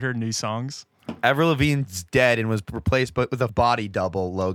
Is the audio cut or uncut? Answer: cut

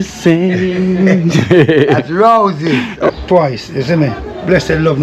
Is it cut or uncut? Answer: cut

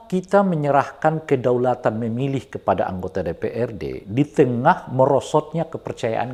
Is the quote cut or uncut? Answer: uncut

